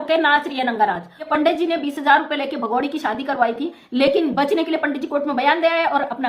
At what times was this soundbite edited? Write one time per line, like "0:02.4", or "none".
0:01.3